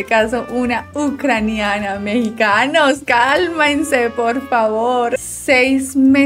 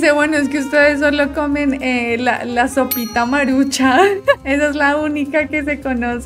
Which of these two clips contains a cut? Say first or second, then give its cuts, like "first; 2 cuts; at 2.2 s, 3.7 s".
first; 1 cut; at 5.1 s